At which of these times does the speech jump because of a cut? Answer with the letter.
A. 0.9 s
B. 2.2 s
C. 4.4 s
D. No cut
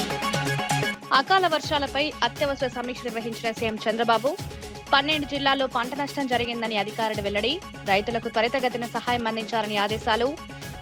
A